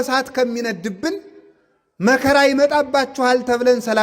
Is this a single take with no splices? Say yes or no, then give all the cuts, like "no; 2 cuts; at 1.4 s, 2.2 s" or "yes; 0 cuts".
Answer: yes; 0 cuts